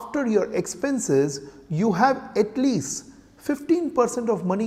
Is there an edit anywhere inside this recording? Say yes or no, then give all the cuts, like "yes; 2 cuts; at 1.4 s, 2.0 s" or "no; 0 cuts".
no; 0 cuts